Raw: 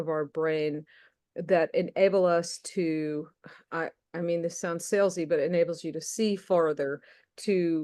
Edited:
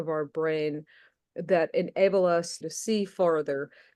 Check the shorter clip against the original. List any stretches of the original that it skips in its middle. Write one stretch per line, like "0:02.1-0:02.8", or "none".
0:02.6-0:05.9